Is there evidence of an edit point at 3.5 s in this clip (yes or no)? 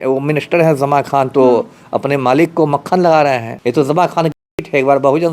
yes